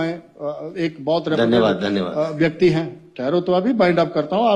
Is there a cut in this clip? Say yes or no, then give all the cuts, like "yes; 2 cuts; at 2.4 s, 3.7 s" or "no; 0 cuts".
no; 0 cuts